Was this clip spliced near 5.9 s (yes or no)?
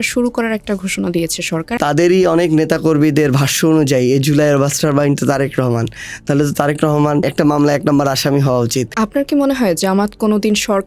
no